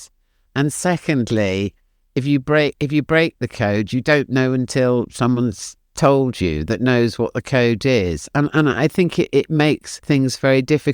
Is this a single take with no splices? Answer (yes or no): no